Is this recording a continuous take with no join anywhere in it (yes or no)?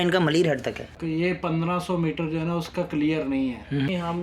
yes